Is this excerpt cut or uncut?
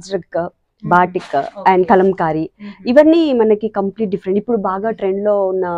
uncut